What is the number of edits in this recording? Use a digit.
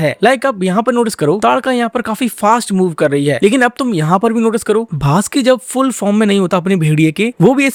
0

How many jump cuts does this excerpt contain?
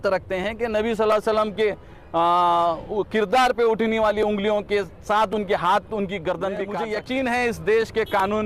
1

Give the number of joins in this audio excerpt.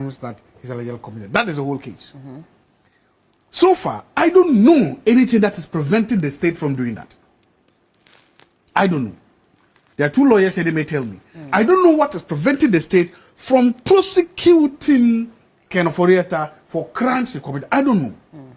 0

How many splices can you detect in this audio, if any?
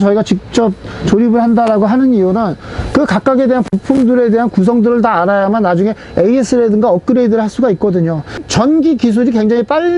0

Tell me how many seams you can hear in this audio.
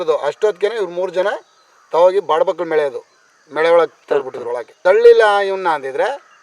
1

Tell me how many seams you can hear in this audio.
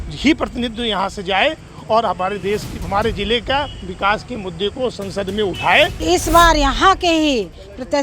1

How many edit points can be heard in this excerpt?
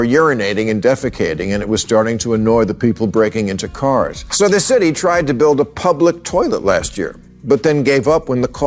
1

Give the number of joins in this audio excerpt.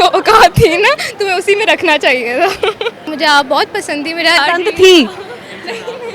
2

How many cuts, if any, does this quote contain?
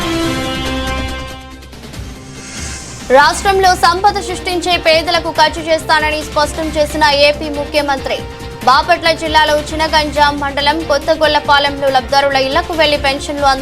1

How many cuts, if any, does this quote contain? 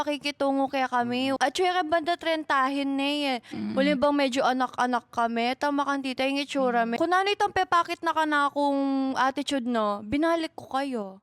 2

